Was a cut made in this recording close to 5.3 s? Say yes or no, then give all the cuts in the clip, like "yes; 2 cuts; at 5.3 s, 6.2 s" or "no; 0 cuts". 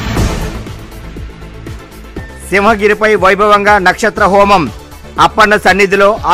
no; 1 cut; at 2.0 s